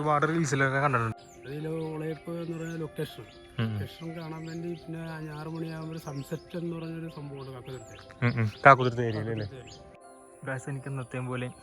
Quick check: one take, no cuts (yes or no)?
no